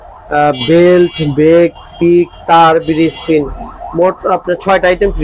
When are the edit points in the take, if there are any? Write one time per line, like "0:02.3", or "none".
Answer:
none